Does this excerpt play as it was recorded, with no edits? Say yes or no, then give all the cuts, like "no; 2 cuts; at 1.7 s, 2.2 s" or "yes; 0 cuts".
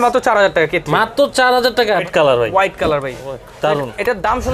no; 1 cut; at 2.0 s